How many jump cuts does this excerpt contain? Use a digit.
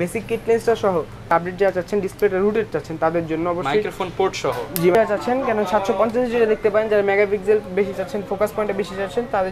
2